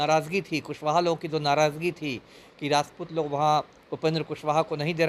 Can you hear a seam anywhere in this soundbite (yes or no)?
no